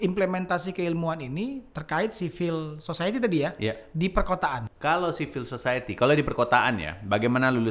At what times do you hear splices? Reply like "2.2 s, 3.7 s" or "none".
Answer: 4.7 s